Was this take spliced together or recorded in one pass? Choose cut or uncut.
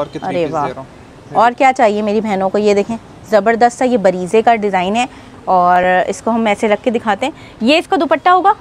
uncut